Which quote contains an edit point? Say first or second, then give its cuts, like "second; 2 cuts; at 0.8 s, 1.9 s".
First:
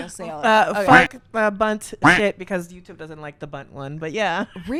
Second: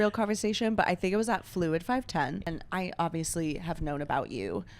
second; 1 cut; at 2.5 s